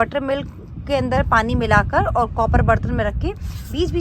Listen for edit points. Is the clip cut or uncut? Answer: uncut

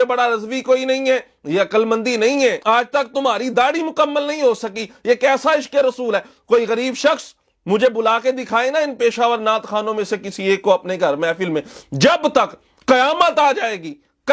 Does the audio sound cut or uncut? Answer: cut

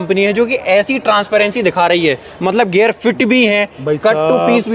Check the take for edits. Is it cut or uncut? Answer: uncut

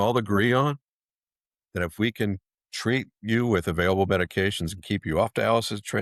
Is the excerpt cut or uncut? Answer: uncut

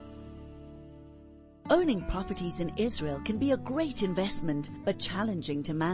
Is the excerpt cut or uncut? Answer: cut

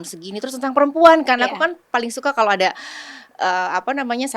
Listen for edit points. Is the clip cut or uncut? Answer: uncut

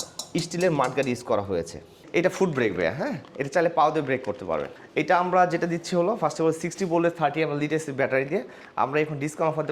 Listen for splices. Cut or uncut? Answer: cut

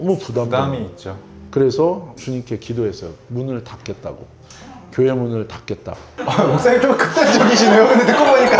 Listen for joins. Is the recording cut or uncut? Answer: cut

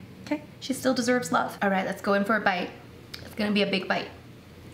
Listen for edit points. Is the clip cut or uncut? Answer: cut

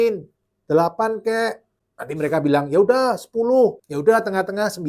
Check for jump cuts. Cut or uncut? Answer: cut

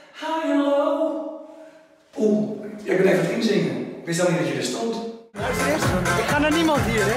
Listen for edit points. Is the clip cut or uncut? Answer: cut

